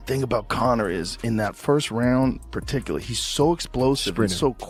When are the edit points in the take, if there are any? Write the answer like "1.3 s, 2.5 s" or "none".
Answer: none